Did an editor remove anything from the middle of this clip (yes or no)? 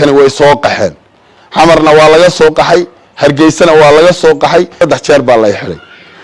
yes